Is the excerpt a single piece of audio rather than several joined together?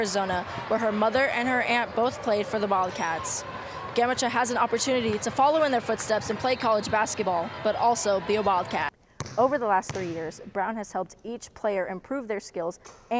no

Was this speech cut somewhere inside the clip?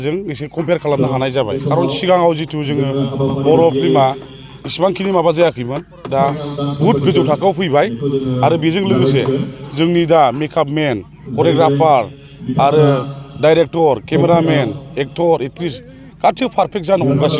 no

